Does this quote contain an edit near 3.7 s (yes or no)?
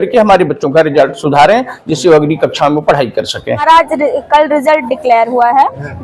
yes